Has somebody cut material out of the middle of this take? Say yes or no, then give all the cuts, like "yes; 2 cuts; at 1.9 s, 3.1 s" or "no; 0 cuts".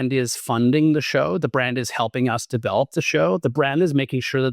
no; 0 cuts